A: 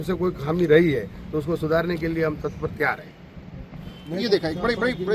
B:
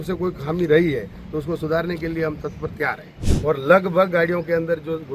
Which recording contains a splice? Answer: B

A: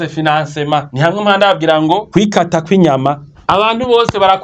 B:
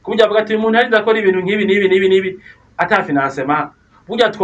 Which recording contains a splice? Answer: A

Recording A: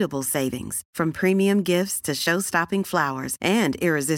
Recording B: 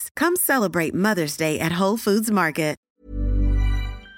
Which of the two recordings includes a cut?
B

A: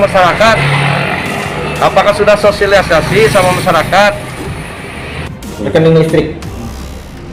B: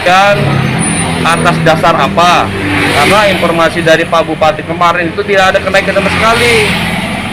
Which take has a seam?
A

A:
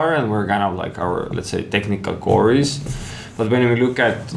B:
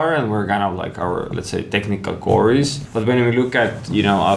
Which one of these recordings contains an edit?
B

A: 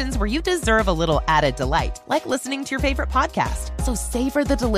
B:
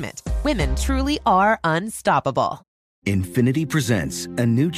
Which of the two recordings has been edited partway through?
B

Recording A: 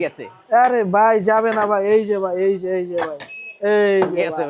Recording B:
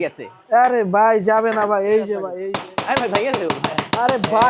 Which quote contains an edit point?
B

